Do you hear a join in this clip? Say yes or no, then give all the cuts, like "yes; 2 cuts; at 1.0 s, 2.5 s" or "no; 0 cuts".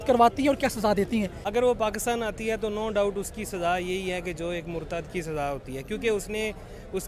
yes; 1 cut; at 1.4 s